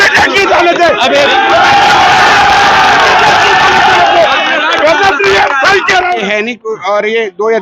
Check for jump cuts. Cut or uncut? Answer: cut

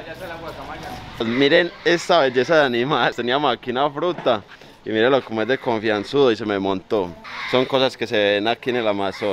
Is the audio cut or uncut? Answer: uncut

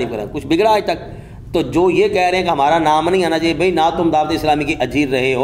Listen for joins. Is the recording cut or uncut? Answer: uncut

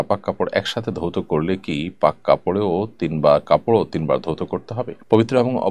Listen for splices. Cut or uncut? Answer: uncut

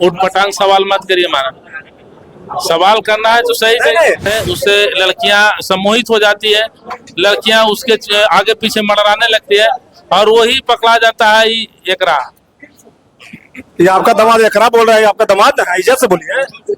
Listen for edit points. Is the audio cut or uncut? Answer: cut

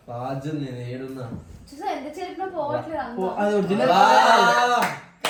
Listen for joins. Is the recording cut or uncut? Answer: uncut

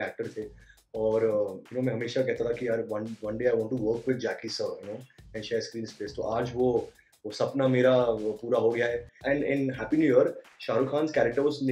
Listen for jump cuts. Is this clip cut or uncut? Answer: cut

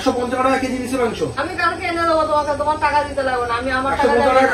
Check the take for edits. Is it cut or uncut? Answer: cut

